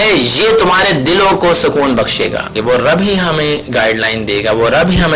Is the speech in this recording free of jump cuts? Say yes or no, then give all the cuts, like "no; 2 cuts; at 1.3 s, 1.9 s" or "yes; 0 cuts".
no; 1 cut; at 2.5 s